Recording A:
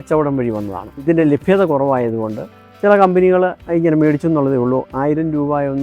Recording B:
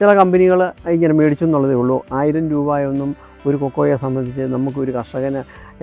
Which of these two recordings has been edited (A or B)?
A